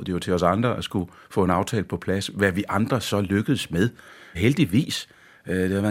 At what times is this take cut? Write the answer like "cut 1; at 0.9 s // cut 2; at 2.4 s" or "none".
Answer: cut 1; at 4.3 s